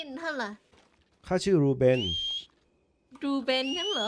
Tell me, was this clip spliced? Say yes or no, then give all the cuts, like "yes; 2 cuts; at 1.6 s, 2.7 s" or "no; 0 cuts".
no; 0 cuts